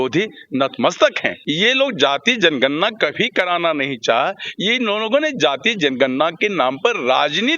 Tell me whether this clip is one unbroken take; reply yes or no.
no